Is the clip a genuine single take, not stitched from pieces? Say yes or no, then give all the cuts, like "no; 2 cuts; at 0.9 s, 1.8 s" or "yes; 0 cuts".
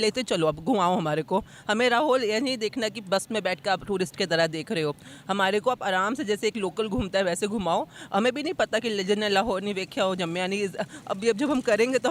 yes; 0 cuts